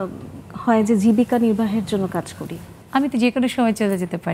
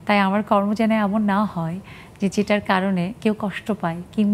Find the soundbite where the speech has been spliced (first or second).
first